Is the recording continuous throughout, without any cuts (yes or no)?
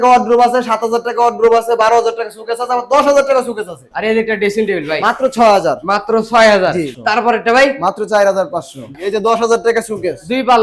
no